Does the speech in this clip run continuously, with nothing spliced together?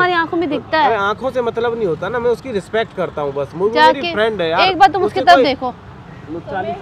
yes; 0 cuts

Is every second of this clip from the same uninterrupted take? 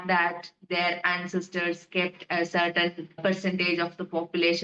no; 1 cut; at 3.1 s

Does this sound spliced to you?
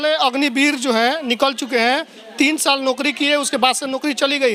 no; 0 cuts

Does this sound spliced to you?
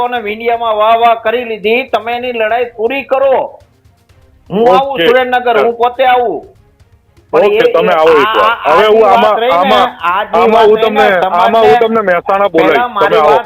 no; 0 cuts

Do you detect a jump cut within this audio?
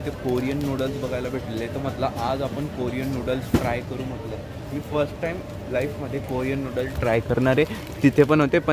no; 0 cuts

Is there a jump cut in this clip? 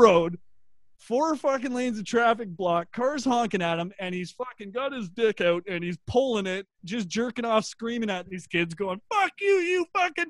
no; 0 cuts

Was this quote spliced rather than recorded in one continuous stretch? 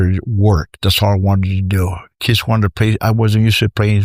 no; 0 cuts

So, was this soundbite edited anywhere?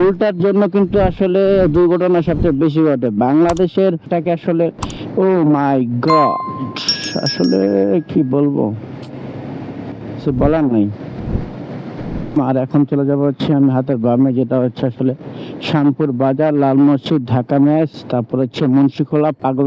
yes; 2 cuts; at 4.1 s, 12.4 s

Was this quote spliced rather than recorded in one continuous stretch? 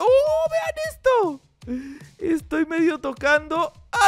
no; 0 cuts

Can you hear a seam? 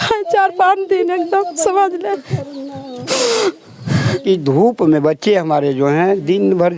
yes; 1 cut; at 4.2 s

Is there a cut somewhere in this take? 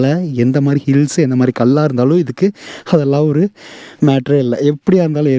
no; 0 cuts

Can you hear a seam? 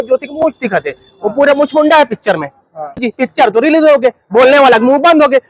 yes; 1 cut; at 3.0 s

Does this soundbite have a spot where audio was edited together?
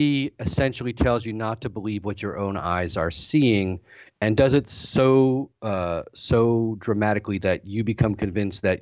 no; 0 cuts

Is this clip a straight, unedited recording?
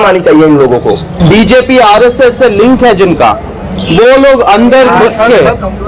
no; 1 cut; at 1.1 s

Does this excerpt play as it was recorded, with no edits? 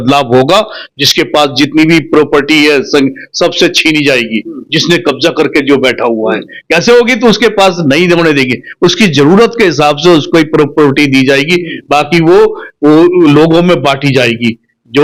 yes; 0 cuts

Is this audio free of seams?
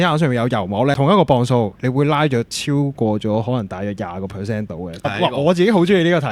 no; 3 cuts; at 0.9 s, 2.6 s, 5.0 s

